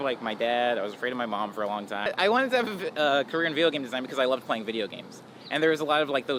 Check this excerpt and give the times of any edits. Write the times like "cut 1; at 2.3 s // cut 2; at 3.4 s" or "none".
cut 1; at 2.1 s